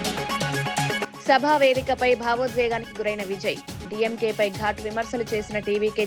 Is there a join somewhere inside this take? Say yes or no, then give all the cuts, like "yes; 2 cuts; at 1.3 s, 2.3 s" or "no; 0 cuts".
yes; 1 cut; at 0.9 s